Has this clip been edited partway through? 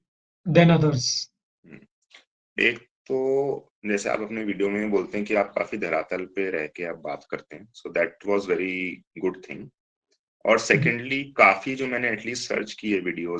no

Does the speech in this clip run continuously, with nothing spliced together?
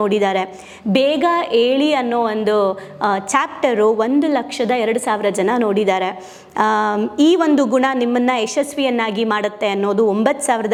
yes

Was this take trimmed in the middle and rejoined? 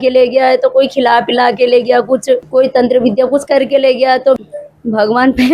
yes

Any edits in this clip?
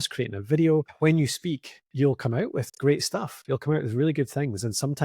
yes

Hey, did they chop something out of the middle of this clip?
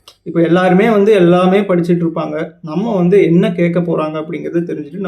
no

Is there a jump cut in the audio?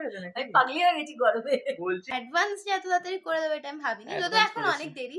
yes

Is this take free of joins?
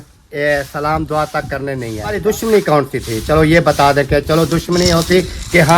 no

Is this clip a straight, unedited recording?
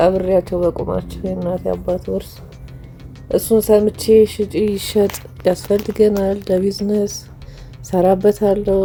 yes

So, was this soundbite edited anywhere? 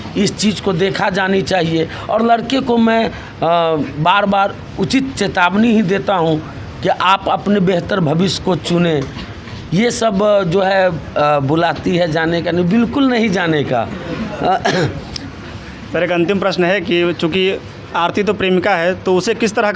no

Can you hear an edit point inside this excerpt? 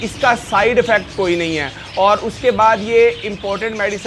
no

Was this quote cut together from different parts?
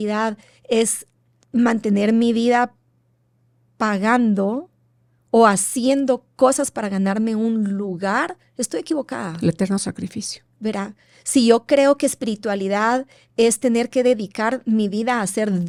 no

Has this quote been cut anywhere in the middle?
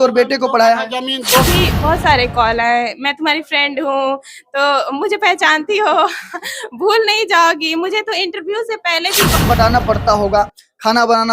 yes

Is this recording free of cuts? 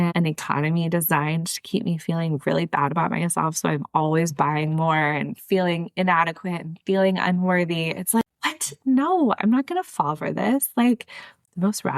no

